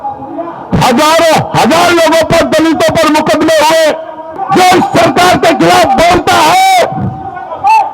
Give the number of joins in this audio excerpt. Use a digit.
1